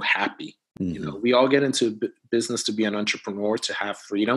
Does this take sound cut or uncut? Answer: uncut